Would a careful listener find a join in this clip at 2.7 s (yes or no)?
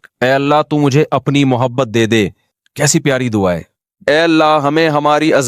no